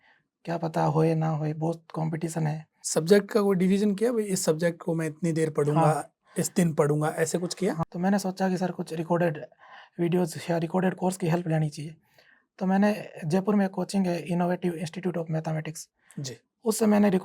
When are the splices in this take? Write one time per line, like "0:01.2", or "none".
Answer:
0:02.7
0:07.8